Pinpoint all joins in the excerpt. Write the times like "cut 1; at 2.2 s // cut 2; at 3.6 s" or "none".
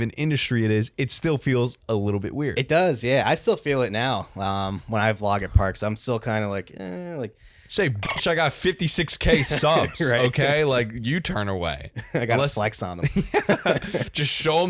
none